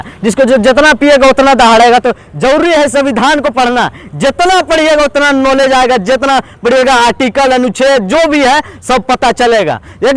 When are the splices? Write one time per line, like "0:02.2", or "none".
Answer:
none